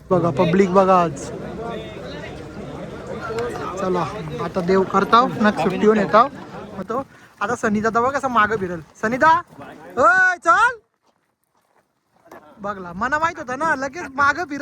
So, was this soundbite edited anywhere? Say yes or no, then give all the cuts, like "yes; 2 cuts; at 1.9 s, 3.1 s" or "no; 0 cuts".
yes; 1 cut; at 6.8 s